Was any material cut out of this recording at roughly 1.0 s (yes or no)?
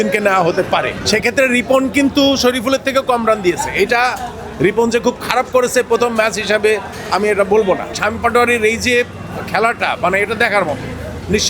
yes